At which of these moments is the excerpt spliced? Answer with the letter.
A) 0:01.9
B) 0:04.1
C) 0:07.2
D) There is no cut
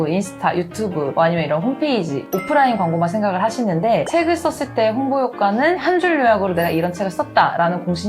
B